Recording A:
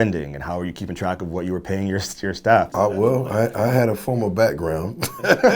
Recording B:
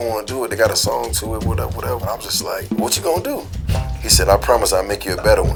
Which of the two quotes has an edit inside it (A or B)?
A